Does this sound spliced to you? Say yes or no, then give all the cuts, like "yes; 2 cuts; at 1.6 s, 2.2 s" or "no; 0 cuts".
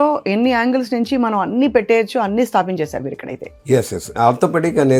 no; 0 cuts